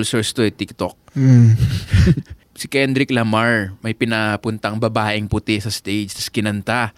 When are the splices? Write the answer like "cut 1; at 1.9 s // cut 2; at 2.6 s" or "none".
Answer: cut 1; at 2.4 s